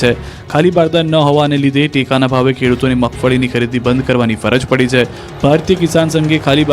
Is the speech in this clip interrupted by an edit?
yes; 1 cut; at 5.6 s

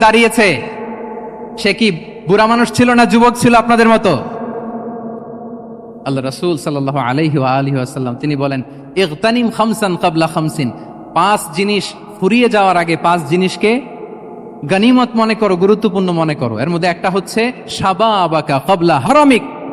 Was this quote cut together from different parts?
no; 0 cuts

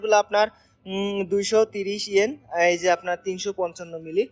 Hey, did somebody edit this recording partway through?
no; 0 cuts

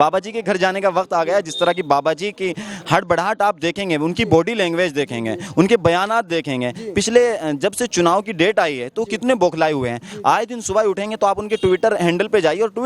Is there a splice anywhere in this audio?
no; 0 cuts

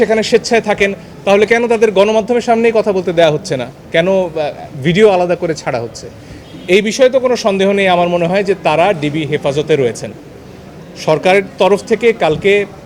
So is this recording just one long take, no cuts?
yes; 0 cuts

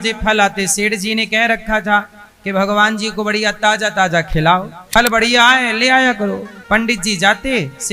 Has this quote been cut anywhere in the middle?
yes; 1 cut; at 4.8 s

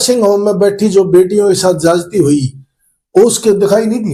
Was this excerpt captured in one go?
yes; 0 cuts

